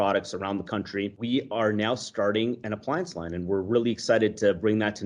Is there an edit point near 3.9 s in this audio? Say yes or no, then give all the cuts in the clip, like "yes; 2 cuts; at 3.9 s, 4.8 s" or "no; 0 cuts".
no; 2 cuts; at 1.2 s, 2.6 s